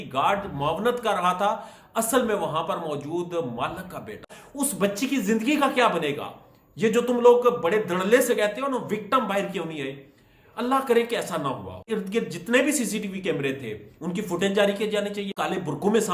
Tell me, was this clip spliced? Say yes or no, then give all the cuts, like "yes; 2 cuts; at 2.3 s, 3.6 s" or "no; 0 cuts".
yes; 3 cuts; at 4.4 s, 11.9 s, 15.3 s